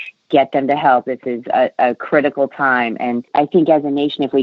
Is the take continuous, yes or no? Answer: no